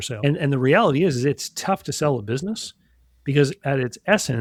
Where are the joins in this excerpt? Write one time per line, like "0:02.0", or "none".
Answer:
none